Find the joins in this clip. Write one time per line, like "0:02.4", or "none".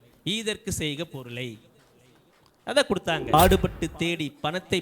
0:03.3